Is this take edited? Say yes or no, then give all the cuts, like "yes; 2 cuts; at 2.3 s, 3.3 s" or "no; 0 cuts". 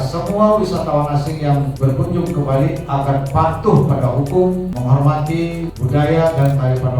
yes; 3 cuts; at 1.7 s, 4.7 s, 5.8 s